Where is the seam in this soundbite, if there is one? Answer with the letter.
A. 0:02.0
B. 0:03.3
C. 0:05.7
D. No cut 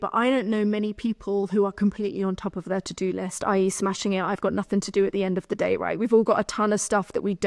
D